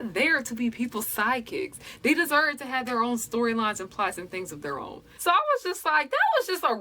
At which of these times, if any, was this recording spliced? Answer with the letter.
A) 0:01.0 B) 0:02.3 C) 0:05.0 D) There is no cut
C